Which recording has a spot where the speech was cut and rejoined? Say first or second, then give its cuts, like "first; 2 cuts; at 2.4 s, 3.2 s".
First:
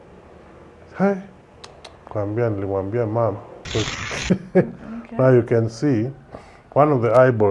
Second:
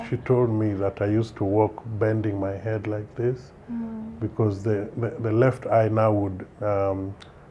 first; 1 cut; at 3.9 s